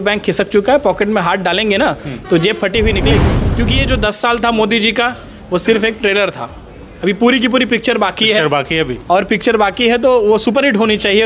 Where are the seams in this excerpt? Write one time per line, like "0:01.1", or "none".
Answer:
0:03.4